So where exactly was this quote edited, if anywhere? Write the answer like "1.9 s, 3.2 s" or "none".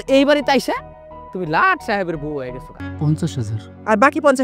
2.8 s